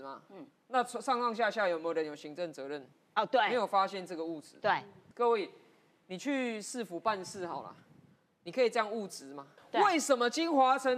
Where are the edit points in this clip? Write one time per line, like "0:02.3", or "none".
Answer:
0:05.0
0:09.6